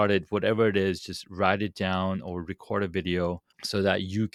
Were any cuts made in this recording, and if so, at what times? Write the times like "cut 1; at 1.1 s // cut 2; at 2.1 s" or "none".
none